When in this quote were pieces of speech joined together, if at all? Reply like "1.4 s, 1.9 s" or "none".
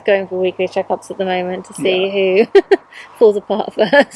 none